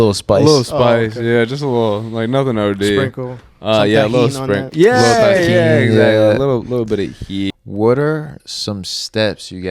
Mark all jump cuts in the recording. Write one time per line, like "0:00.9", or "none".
0:07.5